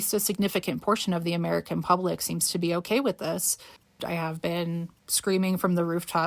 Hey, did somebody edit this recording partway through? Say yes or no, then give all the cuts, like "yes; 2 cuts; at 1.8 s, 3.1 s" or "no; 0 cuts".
yes; 1 cut; at 3.9 s